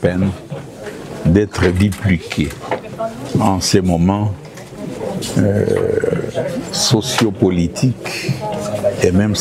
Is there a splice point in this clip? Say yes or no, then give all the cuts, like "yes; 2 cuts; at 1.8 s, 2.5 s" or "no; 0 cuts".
no; 0 cuts